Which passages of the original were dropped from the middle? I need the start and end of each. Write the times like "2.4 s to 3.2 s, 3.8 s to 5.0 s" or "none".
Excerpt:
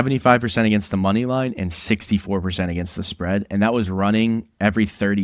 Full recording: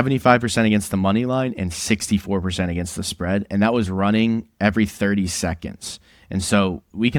none